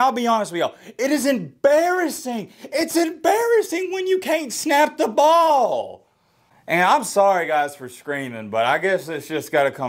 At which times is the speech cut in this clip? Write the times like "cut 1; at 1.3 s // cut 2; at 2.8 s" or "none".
none